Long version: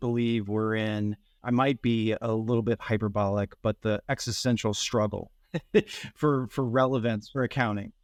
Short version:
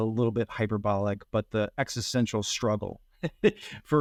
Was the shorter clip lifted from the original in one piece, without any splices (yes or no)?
yes